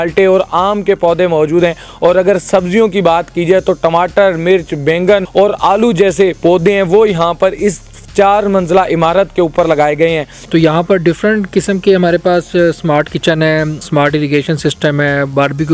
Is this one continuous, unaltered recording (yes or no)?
no